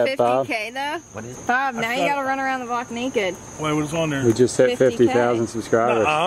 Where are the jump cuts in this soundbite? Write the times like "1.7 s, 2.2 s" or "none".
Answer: none